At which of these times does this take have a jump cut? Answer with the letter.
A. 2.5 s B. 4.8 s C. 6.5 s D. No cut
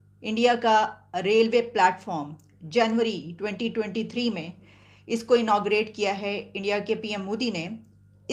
D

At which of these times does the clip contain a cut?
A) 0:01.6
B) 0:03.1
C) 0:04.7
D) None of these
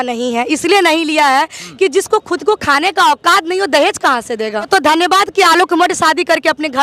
C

